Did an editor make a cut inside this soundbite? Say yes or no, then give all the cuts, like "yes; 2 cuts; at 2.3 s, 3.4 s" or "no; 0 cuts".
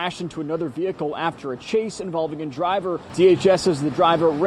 yes; 1 cut; at 3.0 s